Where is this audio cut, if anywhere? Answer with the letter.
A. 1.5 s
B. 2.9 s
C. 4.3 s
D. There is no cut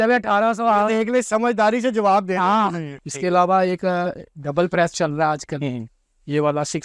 B